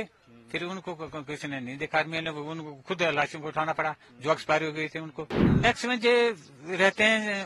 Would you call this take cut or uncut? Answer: cut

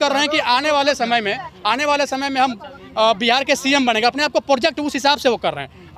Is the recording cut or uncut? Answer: uncut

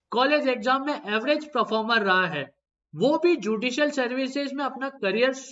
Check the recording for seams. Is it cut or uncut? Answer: uncut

